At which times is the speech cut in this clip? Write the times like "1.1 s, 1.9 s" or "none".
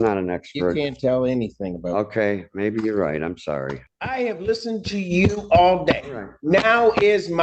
3.8 s